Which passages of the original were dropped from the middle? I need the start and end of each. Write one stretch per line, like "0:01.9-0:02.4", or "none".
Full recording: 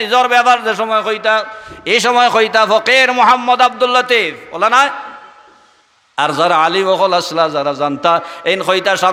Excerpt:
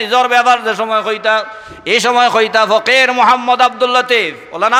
none